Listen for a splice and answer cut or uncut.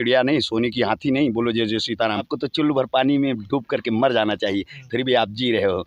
cut